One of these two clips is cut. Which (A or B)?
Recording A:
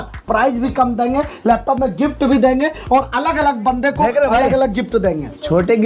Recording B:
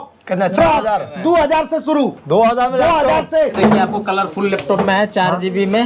B